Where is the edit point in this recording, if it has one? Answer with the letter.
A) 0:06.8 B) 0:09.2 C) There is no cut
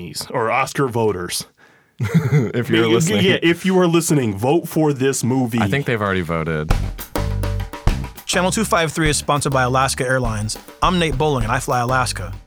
A